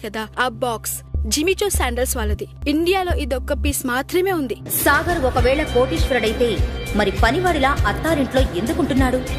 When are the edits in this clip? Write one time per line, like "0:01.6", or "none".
0:02.5
0:04.7